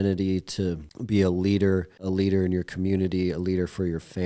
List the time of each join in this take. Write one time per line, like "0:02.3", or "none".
0:00.9
0:01.9

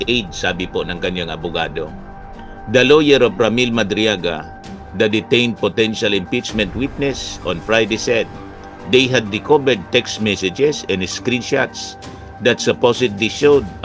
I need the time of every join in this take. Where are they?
none

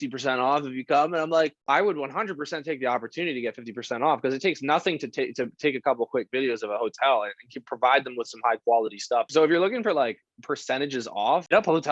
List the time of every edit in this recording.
0:09.3

